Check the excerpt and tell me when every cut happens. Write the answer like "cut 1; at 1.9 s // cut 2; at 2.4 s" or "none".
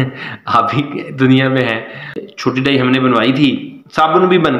cut 1; at 2.2 s